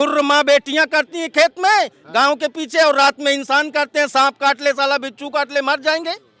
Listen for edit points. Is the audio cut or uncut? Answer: uncut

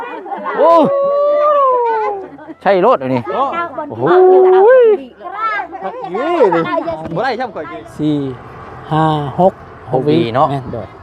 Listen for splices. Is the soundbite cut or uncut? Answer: cut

